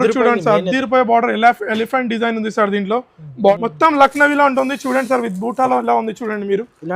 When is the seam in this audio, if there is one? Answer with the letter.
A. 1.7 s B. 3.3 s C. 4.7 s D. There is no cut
B